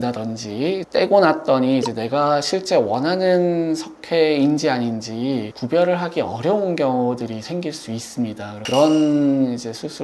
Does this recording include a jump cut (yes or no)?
yes